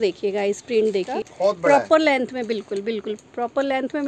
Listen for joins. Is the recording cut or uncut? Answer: cut